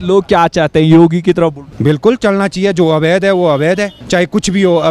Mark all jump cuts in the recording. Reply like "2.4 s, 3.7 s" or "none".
1.7 s, 3.9 s